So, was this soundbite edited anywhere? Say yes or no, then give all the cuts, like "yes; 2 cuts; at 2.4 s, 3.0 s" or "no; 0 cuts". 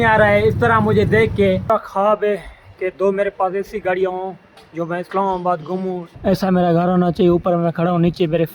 yes; 2 cuts; at 1.6 s, 6.1 s